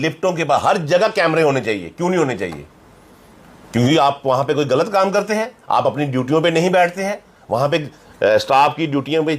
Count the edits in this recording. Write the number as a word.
zero